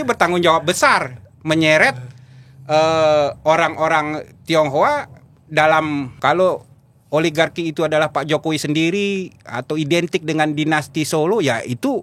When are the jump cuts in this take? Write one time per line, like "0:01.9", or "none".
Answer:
0:06.1